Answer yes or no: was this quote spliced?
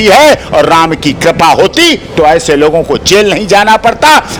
no